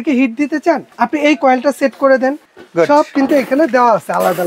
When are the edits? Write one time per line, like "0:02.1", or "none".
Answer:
0:00.9
0:02.5